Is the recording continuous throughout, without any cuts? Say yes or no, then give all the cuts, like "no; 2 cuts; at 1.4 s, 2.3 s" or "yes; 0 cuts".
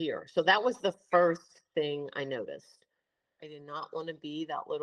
no; 1 cut; at 3.3 s